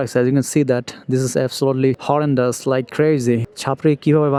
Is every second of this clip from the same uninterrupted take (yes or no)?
yes